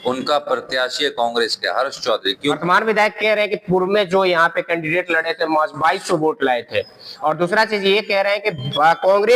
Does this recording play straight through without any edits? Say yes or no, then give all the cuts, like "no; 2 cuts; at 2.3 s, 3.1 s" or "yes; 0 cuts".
no; 1 cut; at 2.6 s